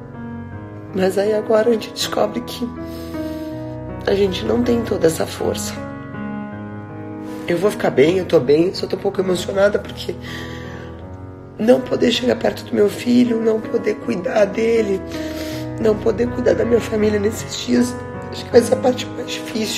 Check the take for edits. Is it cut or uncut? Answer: cut